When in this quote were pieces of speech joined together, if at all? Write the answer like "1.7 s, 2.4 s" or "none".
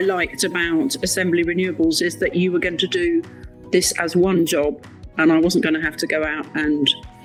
none